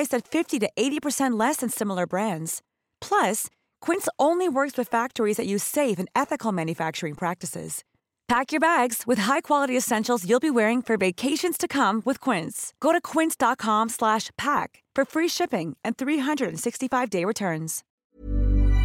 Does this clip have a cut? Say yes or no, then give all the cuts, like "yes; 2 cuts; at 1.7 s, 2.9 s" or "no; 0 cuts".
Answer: yes; 1 cut; at 17.8 s